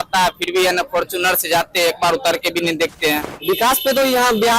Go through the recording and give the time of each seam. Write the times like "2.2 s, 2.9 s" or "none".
3.3 s